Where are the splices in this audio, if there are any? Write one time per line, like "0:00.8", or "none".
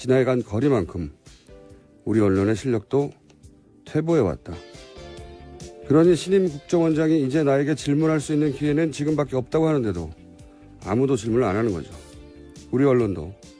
0:07.2